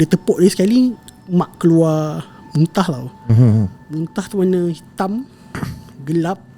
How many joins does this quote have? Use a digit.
0